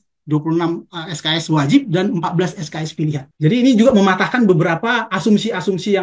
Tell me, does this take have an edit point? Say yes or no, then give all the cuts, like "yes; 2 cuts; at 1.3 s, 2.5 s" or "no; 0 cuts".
yes; 1 cut; at 3.3 s